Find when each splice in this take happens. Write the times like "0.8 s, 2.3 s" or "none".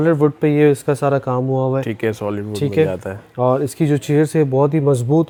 none